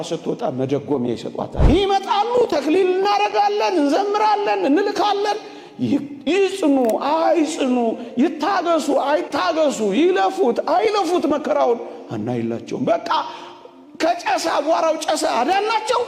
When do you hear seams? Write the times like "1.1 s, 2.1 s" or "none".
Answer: 1.6 s